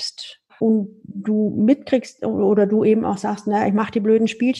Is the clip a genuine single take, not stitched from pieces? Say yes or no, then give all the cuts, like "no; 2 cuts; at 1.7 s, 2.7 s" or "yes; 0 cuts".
yes; 0 cuts